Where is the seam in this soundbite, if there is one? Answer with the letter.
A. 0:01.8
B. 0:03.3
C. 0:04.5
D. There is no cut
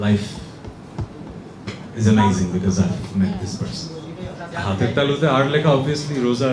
C